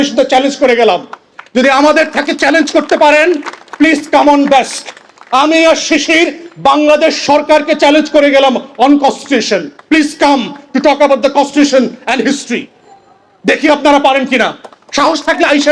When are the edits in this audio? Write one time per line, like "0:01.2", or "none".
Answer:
none

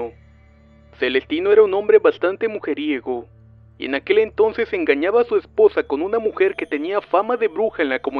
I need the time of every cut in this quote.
0:04.3

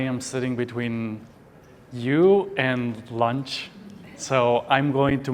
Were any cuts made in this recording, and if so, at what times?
none

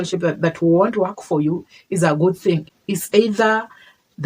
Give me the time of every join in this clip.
0:02.7

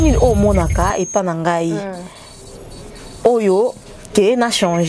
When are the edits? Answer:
none

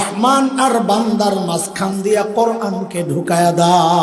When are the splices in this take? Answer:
none

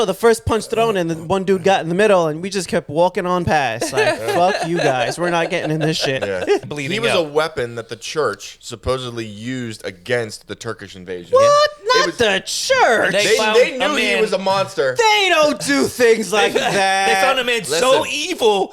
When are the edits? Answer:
0:06.6

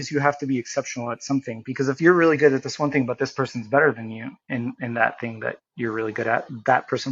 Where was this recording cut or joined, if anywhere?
0:02.0

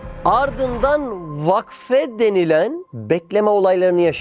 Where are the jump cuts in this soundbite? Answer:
0:02.9

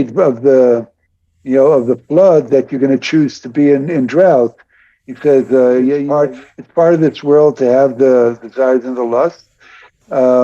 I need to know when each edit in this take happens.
0:06.0

